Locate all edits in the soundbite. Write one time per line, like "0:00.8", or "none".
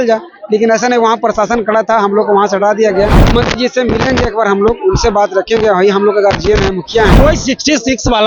0:03.3
0:07.1